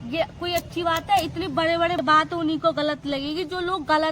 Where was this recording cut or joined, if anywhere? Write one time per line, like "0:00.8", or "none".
0:02.0